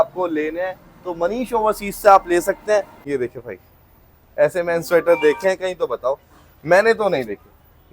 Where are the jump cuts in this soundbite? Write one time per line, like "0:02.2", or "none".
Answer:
0:03.0